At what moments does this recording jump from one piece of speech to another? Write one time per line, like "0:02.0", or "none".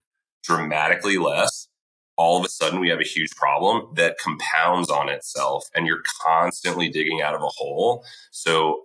none